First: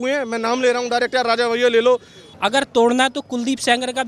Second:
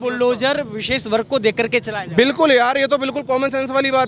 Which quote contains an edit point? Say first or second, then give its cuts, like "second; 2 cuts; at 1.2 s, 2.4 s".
first; 1 cut; at 2.3 s